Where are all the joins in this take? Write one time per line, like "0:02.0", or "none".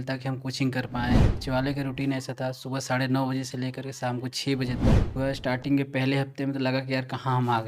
0:01.3
0:05.1